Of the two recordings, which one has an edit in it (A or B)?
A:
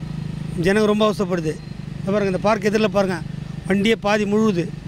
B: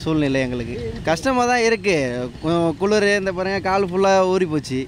B